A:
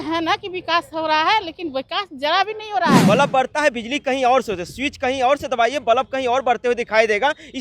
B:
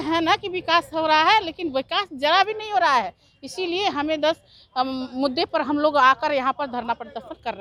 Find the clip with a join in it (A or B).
A